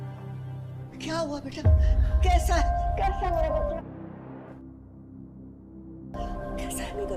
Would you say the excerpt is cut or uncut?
cut